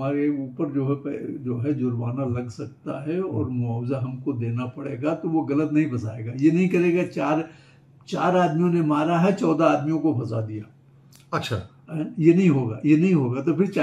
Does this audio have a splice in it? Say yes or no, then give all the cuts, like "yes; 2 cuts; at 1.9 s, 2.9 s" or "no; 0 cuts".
no; 0 cuts